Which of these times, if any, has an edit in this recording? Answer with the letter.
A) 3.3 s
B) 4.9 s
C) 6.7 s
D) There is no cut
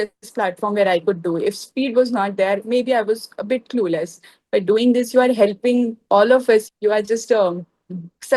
C